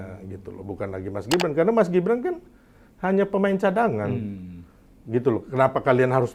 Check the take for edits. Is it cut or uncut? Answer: uncut